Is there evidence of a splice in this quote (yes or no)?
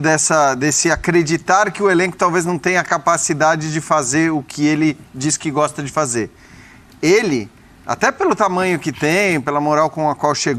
no